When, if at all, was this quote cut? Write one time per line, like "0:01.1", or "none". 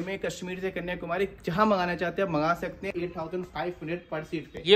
0:02.9